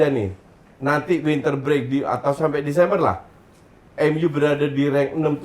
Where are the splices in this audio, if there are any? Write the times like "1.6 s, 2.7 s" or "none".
none

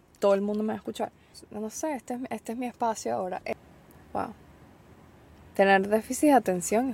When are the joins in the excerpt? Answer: 3.5 s

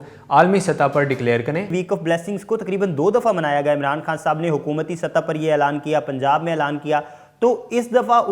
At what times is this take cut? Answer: 1.7 s

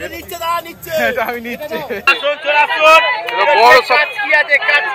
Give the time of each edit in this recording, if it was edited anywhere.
2.1 s

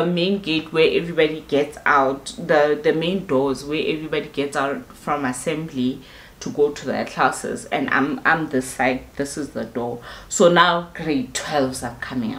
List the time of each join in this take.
none

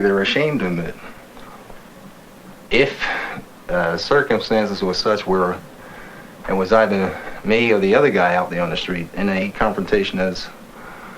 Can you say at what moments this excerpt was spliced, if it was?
1.9 s

